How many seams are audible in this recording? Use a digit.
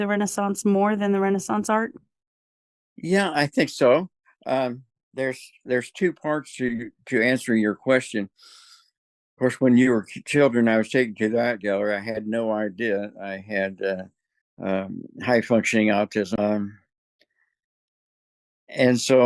0